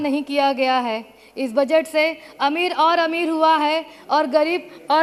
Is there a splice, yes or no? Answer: no